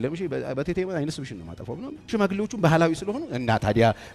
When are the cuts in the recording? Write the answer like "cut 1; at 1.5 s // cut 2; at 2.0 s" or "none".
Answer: cut 1; at 2.0 s